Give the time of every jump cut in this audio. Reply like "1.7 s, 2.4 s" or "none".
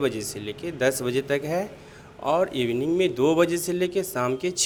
none